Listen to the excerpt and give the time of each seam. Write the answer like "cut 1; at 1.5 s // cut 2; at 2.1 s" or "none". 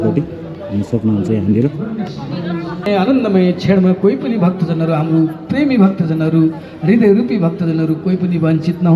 cut 1; at 2.9 s